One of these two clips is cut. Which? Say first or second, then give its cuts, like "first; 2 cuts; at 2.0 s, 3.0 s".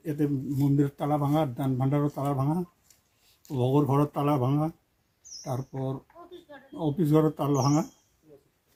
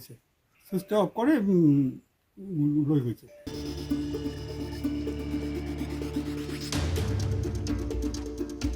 second; 1 cut; at 3.3 s